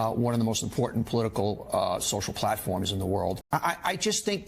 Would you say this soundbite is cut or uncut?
cut